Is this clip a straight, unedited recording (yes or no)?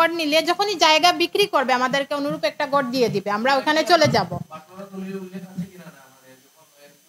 yes